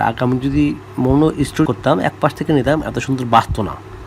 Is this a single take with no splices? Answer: no; 1 cut; at 1.7 s

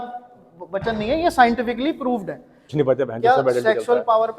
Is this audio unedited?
no; 1 cut; at 2.6 s

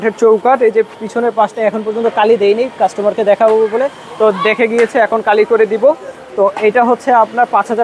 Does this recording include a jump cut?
no; 0 cuts

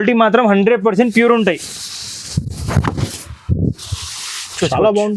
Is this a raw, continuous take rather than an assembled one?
yes; 0 cuts

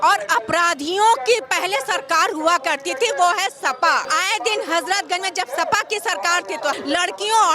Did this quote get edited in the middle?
yes; 2 cuts; at 4.1 s, 6.8 s

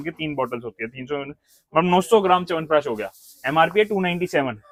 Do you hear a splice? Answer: no; 0 cuts

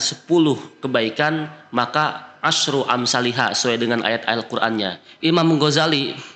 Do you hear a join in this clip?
yes; 1 cut; at 5.0 s

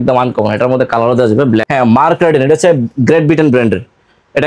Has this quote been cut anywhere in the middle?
yes; 1 cut; at 1.7 s

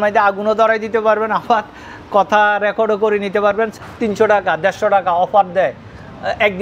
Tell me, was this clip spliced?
yes; 1 cut; at 3.7 s

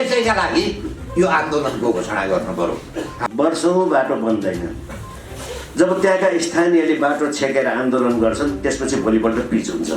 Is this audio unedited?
no; 1 cut; at 3.2 s

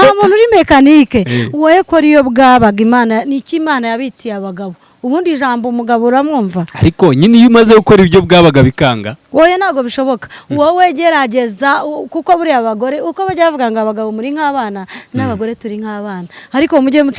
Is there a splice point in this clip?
no; 0 cuts

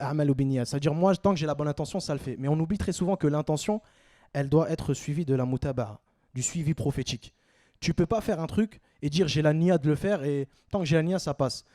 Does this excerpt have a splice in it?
no; 0 cuts

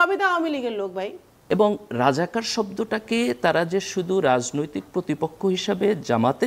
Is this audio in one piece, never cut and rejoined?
no; 1 cut; at 1.3 s

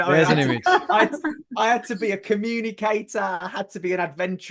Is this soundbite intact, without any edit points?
yes; 0 cuts

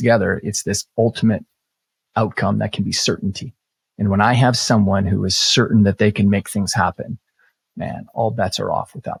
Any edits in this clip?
no; 0 cuts

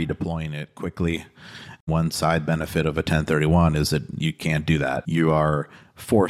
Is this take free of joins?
no; 2 cuts; at 1.9 s, 5.0 s

